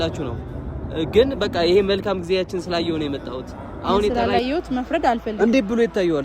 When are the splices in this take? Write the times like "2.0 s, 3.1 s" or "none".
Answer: 4.1 s